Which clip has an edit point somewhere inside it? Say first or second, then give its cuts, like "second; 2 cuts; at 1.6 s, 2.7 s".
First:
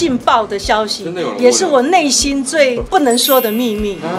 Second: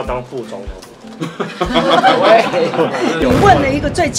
first; 1 cut; at 2.8 s